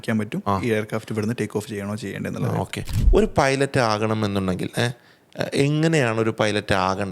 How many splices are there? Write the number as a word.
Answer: one